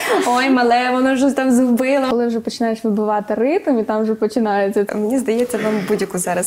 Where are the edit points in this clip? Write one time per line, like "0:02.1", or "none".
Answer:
0:02.1
0:04.9